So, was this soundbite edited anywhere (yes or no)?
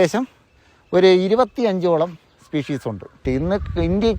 yes